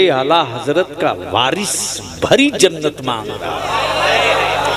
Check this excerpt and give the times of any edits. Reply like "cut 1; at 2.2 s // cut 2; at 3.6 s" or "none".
none